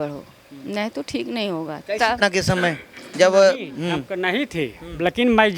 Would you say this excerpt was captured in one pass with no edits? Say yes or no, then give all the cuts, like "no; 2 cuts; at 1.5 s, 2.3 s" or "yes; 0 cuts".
no; 1 cut; at 2.2 s